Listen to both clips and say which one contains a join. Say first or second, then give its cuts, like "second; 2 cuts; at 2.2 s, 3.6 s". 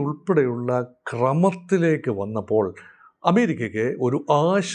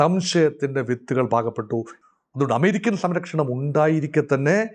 second; 1 cut; at 1.9 s